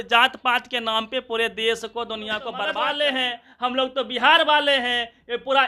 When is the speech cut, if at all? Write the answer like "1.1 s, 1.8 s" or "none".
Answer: 2.6 s